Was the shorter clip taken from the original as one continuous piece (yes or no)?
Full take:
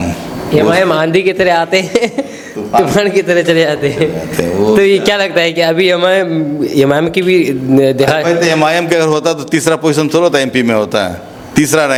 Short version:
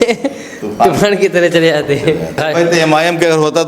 no